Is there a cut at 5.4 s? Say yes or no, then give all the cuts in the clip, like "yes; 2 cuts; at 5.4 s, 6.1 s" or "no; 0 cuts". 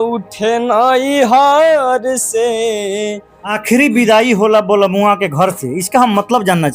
no; 1 cut; at 3.5 s